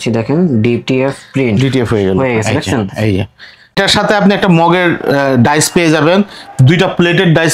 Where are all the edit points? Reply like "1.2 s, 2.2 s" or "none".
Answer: 3.8 s